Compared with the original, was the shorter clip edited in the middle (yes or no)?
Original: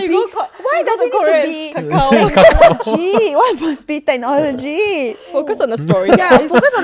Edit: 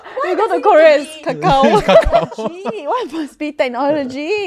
no